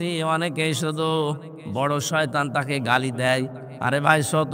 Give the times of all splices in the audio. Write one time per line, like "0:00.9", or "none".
none

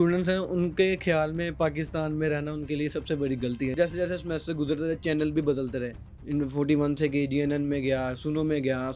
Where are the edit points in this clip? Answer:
0:03.7

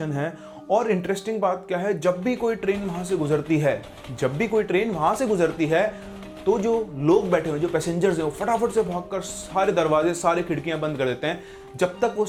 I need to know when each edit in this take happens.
none

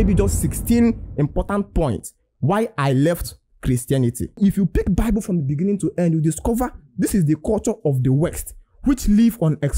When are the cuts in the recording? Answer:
0:04.4

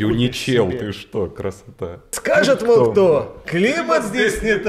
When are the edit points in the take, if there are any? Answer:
0:02.2

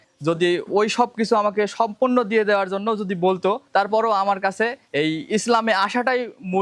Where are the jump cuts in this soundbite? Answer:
0:03.6
0:04.8

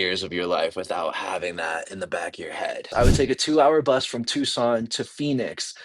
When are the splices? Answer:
0:02.9

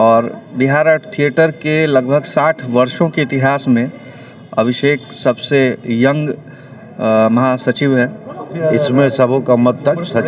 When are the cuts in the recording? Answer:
0:08.6

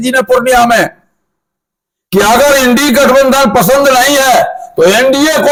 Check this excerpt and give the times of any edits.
none

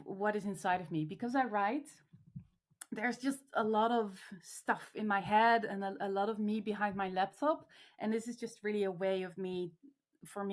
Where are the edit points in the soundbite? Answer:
none

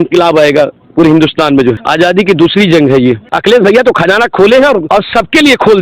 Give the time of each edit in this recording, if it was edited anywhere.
0:01.8
0:03.3
0:04.8

